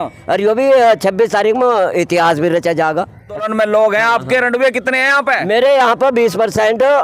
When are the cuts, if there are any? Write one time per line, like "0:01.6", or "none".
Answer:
0:03.5